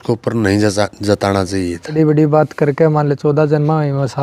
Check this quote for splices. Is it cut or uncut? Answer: cut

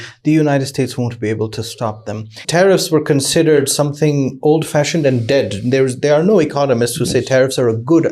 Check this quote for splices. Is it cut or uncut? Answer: cut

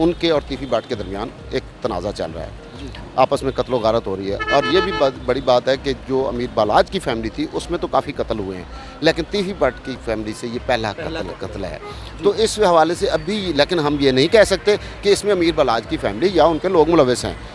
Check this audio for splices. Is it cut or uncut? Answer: uncut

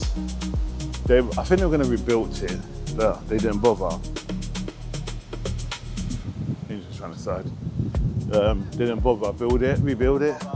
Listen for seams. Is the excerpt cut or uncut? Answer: uncut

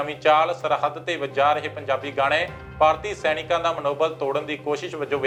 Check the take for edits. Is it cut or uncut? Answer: uncut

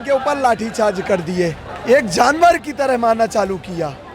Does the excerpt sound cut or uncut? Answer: cut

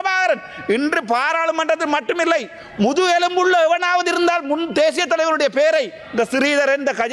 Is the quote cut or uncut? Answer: uncut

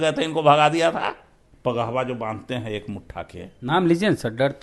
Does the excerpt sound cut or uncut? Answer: cut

